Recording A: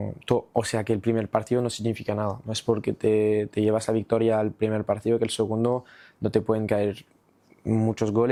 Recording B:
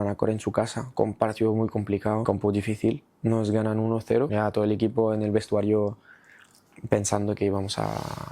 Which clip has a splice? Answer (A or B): B